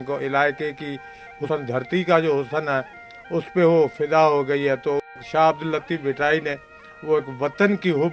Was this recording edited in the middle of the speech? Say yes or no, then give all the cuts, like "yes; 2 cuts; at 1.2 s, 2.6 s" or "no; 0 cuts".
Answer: yes; 1 cut; at 1.4 s